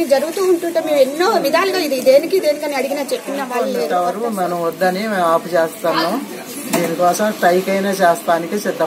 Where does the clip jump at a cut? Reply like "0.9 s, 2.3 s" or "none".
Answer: 3.9 s